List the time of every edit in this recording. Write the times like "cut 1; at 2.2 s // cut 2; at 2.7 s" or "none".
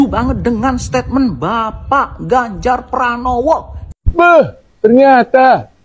cut 1; at 3.8 s